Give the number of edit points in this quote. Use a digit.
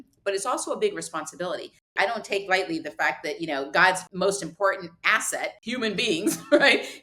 3